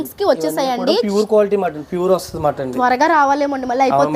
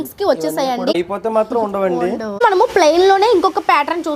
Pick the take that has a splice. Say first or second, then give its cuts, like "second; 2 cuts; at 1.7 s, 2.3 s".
second; 2 cuts; at 0.9 s, 2.4 s